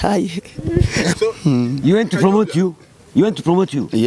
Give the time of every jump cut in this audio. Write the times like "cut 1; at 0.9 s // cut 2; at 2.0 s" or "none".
cut 1; at 1.1 s